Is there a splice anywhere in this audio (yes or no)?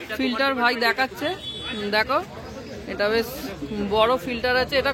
no